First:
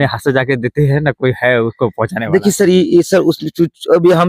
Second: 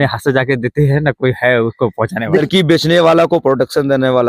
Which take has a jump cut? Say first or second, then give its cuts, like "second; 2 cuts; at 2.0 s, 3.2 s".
second; 1 cut; at 2.4 s